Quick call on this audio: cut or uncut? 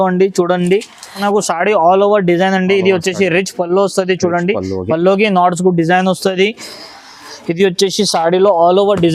cut